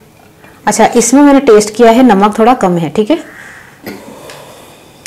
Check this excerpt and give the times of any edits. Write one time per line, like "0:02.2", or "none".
0:03.8